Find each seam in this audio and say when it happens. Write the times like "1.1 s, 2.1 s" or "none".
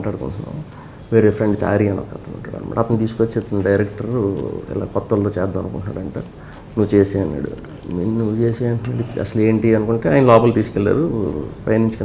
none